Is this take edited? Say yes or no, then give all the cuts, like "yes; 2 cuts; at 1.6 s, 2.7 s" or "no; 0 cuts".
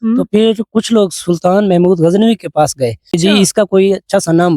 yes; 1 cut; at 3.1 s